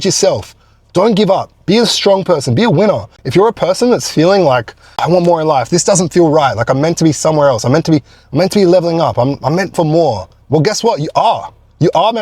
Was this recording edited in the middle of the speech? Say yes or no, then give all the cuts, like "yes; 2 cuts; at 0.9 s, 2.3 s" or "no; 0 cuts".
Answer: yes; 2 cuts; at 3.1 s, 5.0 s